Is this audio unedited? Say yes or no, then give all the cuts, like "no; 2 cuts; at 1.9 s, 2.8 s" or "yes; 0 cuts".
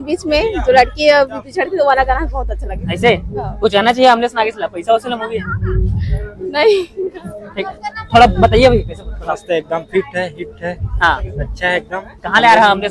yes; 0 cuts